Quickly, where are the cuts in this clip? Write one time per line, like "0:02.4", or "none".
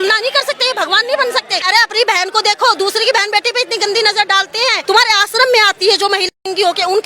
0:01.6
0:04.8